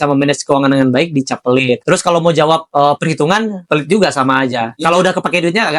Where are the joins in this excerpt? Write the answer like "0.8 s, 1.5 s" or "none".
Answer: 1.8 s, 2.7 s, 3.6 s, 4.7 s